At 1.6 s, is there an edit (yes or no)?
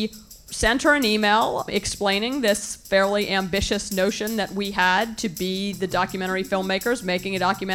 yes